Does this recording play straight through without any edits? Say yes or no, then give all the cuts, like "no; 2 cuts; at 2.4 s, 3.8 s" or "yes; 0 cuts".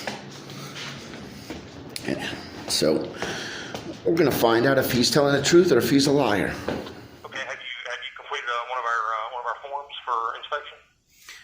no; 1 cut; at 7.1 s